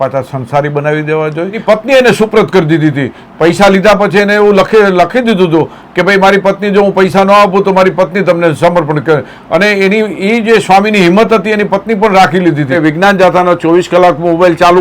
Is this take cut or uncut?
cut